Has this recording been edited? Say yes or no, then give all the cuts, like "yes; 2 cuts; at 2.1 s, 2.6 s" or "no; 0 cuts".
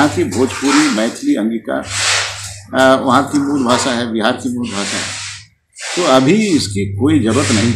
no; 0 cuts